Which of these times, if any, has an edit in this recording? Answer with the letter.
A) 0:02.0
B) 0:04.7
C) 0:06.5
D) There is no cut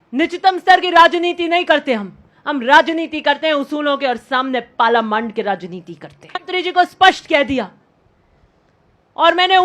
C